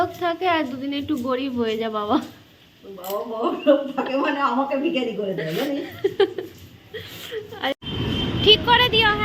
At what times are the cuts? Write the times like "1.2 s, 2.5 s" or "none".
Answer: 7.7 s

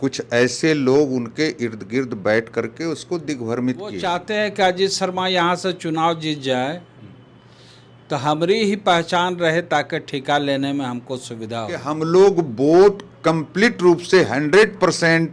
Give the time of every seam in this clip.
4.0 s, 11.9 s

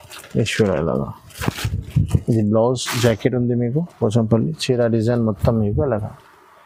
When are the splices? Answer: none

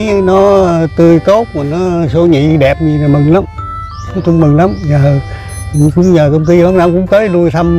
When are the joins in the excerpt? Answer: none

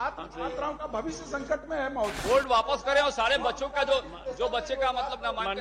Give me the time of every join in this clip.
2.2 s

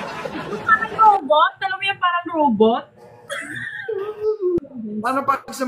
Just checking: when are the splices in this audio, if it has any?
4.6 s

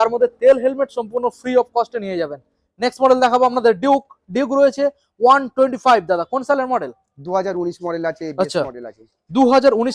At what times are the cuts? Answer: none

